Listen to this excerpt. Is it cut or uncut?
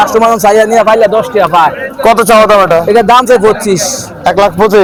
uncut